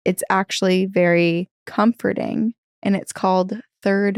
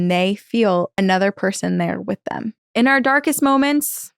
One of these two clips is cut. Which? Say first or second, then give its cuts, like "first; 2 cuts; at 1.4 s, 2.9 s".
second; 2 cuts; at 0.9 s, 2.6 s